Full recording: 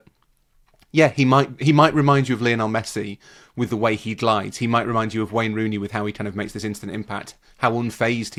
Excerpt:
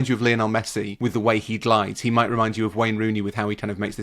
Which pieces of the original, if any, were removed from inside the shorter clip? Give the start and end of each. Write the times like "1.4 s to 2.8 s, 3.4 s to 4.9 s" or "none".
3.1 s to 3.5 s